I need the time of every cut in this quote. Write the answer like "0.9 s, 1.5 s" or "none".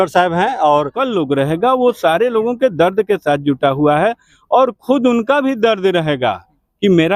1.0 s